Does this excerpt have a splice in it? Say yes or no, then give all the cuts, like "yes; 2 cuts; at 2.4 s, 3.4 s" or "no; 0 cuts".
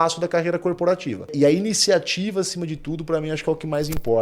yes; 1 cut; at 1.3 s